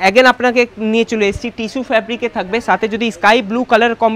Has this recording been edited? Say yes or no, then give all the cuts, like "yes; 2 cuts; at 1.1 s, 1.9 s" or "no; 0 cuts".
no; 0 cuts